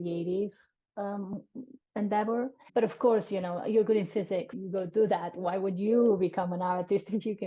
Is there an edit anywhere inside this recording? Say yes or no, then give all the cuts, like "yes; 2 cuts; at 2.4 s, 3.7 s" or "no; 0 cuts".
yes; 2 cuts; at 2.6 s, 4.6 s